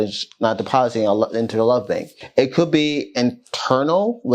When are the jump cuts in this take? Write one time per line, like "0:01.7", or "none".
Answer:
0:02.1